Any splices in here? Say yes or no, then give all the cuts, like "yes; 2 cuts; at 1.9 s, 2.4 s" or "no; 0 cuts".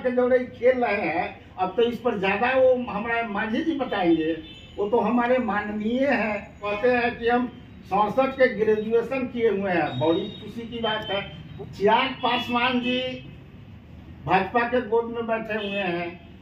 yes; 2 cuts; at 6.7 s, 11.4 s